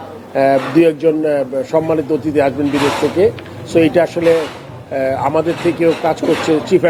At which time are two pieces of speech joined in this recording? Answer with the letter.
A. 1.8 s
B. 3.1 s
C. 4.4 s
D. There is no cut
D